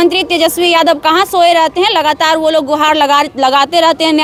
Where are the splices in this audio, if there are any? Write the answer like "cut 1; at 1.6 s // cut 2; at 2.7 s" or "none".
none